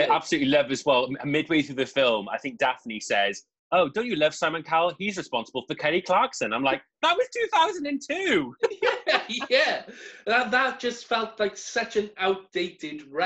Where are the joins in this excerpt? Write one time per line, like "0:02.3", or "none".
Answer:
none